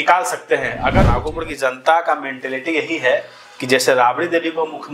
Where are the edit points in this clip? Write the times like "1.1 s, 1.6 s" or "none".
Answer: 1.2 s